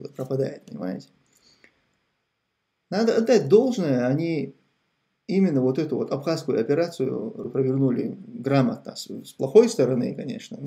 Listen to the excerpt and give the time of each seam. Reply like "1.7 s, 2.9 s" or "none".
7.4 s